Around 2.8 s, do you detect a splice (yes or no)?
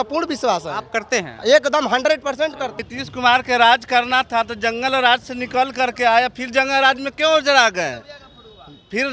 yes